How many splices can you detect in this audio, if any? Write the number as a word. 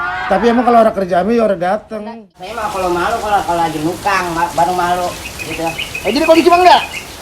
one